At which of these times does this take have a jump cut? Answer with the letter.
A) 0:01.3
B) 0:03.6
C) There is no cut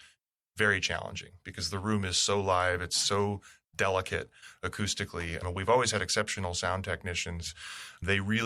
C